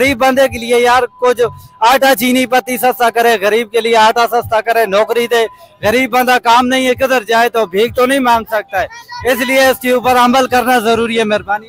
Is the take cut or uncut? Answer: uncut